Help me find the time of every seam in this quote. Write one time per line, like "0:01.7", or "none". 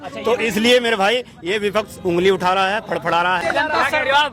0:03.4